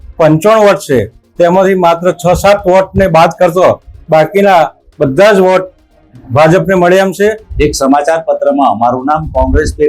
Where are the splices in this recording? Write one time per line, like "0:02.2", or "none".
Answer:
0:07.5